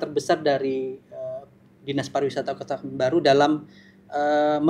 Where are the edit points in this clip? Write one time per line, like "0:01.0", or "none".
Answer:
none